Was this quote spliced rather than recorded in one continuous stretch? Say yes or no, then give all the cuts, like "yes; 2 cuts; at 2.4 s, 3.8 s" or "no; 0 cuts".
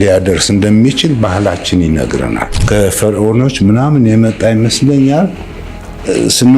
yes; 1 cut; at 2.5 s